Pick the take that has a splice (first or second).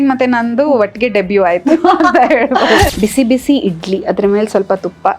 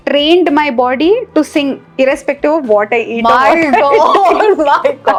first